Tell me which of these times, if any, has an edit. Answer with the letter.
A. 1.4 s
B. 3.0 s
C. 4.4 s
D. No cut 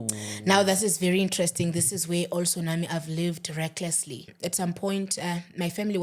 C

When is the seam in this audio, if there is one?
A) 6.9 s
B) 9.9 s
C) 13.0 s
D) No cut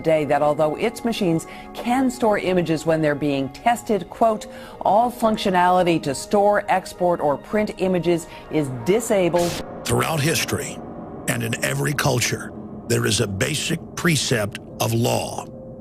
B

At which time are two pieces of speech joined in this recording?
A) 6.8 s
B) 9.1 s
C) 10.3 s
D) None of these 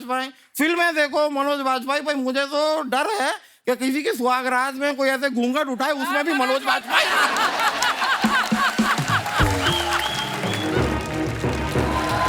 C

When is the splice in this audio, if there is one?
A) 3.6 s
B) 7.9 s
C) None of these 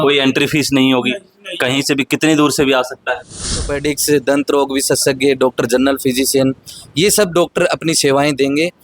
A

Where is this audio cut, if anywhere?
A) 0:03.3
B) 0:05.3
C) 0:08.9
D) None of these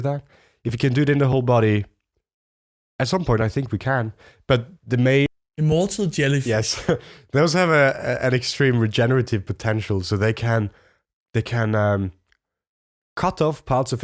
B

